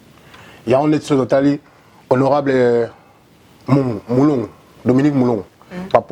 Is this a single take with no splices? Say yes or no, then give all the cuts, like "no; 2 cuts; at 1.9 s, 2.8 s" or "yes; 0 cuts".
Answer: yes; 0 cuts